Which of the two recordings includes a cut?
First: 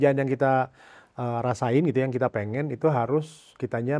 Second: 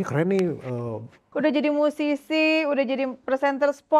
second; 1 cut; at 1.3 s

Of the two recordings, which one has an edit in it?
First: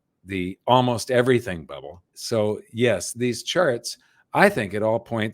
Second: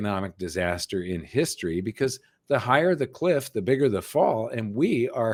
first; 2 cuts; at 2.1 s, 3.1 s

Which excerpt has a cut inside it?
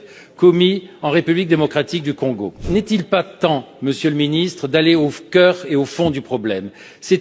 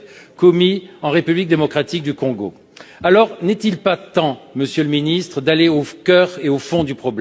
first; 1 cut; at 2.6 s

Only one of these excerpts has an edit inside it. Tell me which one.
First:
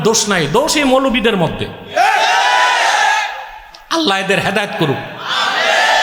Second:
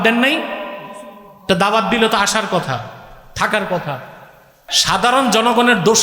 second; 1 cut; at 4.7 s

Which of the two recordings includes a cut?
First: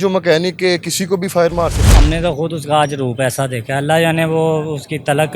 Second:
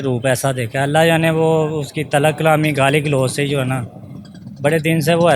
first; 1 cut; at 1.9 s

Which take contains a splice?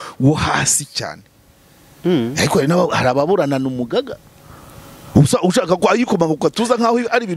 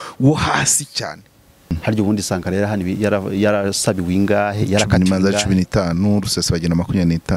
second; 1 cut; at 1.8 s

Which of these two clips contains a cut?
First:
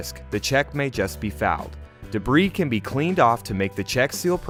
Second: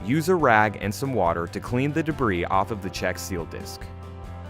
second; 1 cut; at 3.6 s

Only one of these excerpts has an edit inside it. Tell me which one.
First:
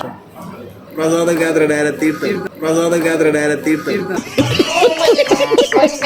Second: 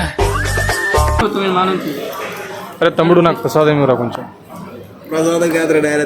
second; 1 cut; at 1.2 s

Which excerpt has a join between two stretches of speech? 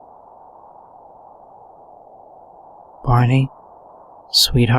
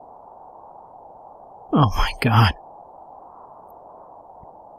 first; 2 cuts; at 1.7 s, 3.0 s

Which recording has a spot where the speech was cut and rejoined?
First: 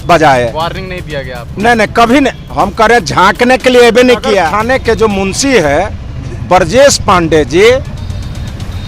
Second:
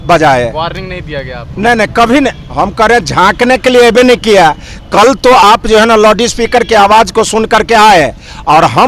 first; 1 cut; at 4.5 s

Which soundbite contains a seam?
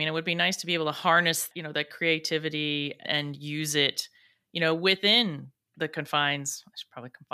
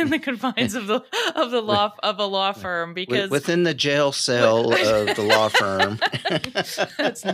first; 2 cuts; at 1.4 s, 3.0 s

